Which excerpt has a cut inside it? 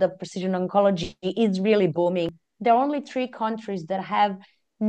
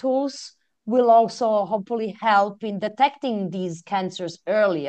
first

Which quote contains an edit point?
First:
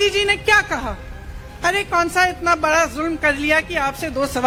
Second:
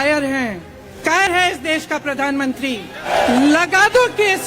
second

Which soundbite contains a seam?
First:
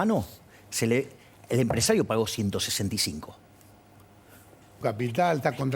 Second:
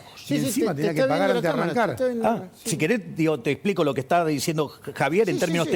first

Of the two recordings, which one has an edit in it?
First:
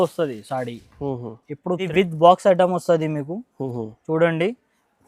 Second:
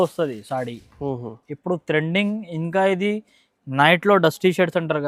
first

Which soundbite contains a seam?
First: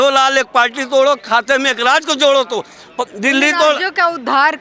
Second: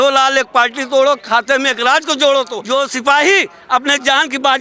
second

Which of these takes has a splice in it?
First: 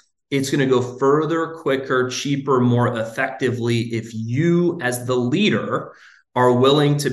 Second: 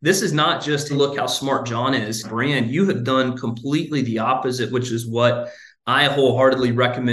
second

